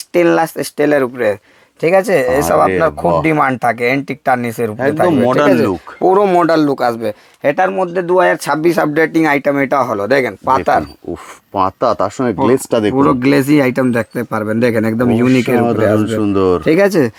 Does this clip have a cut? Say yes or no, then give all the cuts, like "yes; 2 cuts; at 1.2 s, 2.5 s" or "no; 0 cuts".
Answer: no; 0 cuts